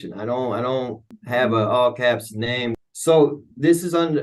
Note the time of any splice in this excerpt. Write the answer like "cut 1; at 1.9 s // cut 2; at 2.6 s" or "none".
cut 1; at 1.1 s // cut 2; at 2.8 s